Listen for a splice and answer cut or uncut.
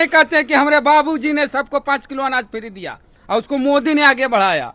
uncut